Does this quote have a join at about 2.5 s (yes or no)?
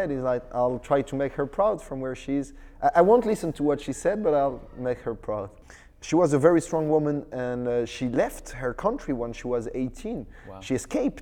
no